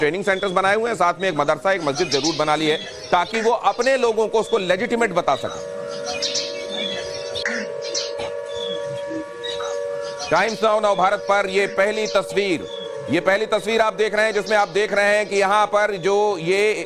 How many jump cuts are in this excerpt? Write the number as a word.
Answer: one